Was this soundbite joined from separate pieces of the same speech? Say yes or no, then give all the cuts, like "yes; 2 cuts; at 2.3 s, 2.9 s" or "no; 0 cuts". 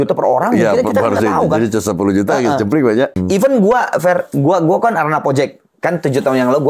yes; 1 cut; at 3.1 s